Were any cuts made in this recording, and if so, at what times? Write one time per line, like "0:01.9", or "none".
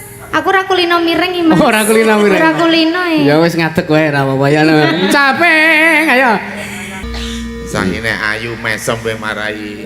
0:07.1